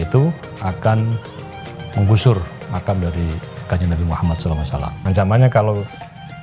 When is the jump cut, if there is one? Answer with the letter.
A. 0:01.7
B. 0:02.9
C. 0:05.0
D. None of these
C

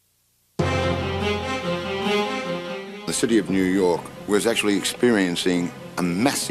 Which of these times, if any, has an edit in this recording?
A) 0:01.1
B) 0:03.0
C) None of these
A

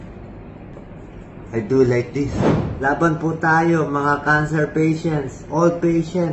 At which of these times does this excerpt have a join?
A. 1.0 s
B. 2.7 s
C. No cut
B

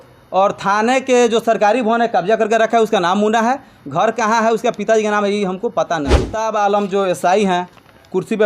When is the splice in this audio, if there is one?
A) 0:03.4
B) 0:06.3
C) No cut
B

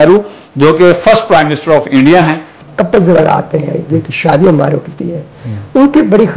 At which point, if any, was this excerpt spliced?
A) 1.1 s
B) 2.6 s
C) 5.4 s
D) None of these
B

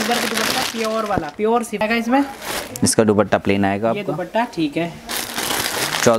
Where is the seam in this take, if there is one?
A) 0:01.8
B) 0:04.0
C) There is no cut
A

